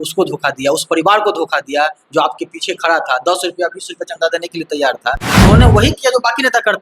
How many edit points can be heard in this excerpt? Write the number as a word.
one